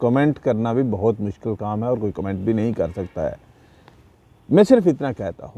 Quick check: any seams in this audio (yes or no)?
no